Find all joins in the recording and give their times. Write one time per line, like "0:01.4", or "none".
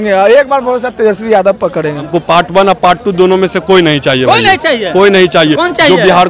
0:02.1